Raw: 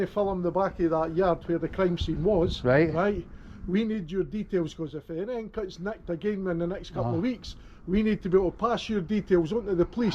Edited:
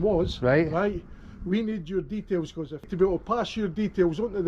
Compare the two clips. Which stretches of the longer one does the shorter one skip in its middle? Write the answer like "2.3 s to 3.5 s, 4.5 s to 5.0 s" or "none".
5.1 s to 8.2 s